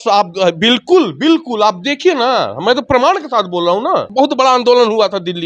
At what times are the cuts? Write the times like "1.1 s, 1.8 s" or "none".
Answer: 4.1 s